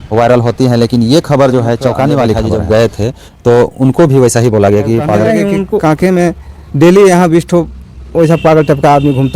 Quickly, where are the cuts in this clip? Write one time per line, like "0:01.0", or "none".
0:02.5
0:05.8